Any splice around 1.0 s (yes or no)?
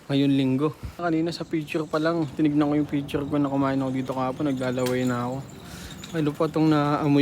yes